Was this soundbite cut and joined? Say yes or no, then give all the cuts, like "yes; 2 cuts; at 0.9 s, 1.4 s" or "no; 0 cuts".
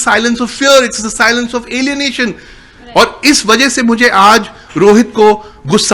yes; 1 cut; at 2.7 s